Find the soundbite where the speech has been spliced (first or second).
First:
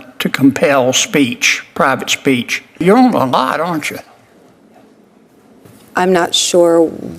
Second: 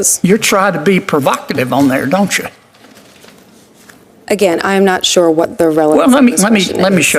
first